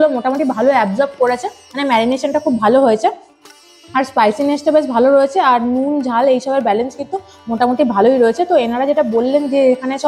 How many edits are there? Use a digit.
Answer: 0